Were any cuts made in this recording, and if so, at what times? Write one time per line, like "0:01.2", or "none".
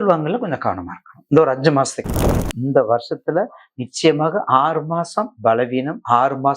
0:02.6